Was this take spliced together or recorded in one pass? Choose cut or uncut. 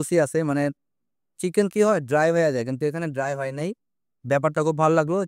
uncut